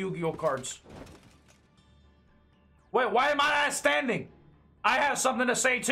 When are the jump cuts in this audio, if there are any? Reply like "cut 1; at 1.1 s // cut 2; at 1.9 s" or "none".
cut 1; at 1.5 s